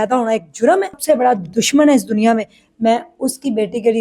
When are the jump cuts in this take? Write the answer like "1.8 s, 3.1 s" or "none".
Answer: 0.9 s

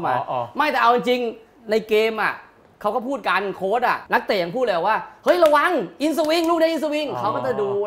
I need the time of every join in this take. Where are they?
4.0 s

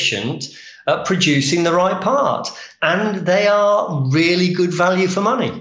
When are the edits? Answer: none

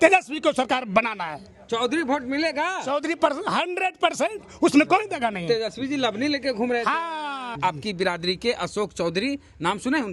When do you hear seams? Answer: 7.6 s

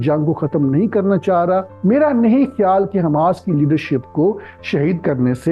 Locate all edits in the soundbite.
1.7 s

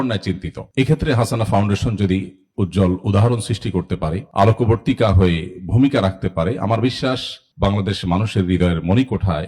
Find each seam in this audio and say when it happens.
none

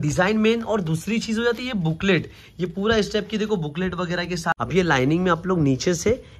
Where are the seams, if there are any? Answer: 4.6 s

